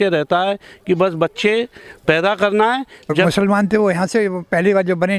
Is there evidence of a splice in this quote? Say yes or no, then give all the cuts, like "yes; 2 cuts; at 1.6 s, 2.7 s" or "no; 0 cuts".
yes; 1 cut; at 3.1 s